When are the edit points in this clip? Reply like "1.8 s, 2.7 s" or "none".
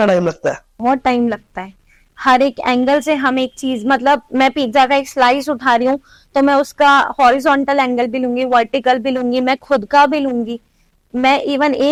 none

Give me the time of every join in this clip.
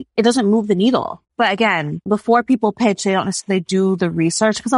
1.2 s, 2.1 s

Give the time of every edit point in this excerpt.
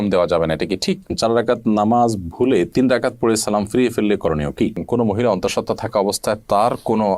1.1 s, 4.8 s

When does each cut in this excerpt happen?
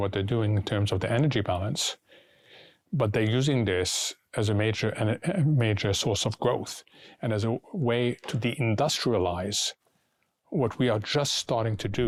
none

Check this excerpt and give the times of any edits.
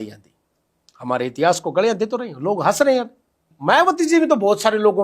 3.5 s

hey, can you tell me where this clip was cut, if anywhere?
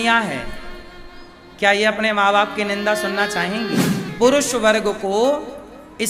4.1 s

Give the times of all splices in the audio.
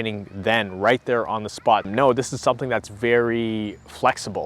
1.9 s

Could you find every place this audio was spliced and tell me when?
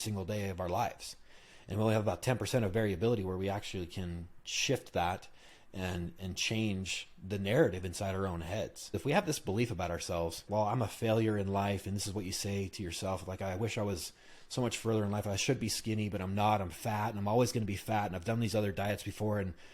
8.9 s, 10.4 s

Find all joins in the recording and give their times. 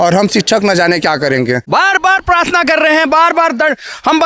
1.6 s

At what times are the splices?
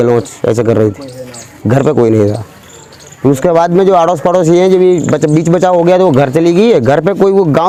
none

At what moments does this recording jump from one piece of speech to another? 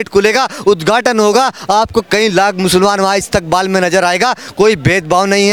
none

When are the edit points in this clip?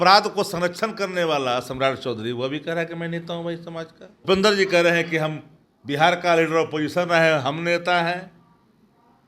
4.2 s

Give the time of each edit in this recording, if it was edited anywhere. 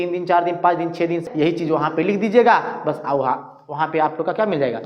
1.2 s

